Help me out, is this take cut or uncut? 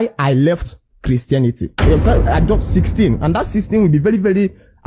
uncut